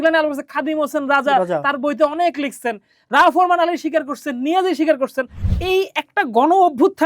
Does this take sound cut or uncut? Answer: cut